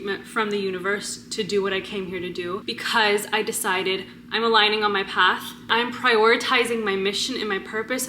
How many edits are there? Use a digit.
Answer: 1